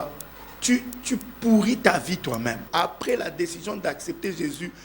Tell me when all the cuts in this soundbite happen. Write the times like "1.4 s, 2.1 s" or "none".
2.6 s